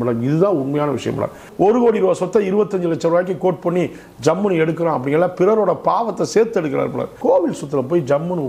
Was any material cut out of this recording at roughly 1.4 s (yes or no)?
yes